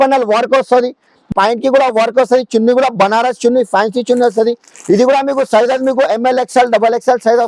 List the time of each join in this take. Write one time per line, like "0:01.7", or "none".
none